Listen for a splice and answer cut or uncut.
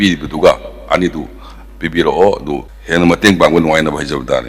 uncut